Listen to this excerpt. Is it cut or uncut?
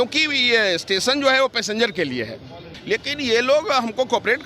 cut